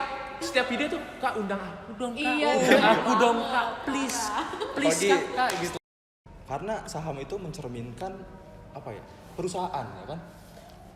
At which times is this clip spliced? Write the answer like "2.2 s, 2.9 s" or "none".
5.7 s